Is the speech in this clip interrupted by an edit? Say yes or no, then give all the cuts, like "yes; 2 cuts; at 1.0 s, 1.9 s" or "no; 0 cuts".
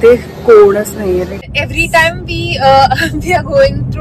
yes; 1 cut; at 1.5 s